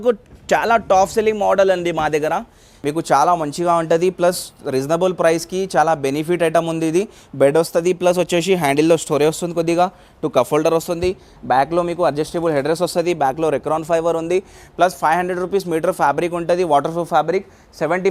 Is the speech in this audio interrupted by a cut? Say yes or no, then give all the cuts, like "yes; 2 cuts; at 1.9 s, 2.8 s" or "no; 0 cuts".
no; 0 cuts